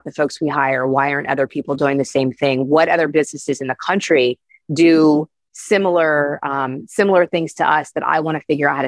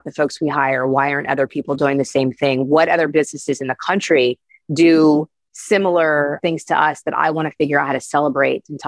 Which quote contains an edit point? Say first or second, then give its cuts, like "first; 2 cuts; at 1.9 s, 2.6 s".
second; 1 cut; at 6.4 s